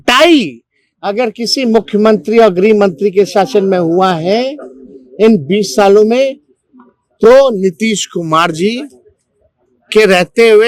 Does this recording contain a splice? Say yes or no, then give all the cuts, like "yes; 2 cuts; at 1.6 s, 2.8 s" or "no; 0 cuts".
no; 0 cuts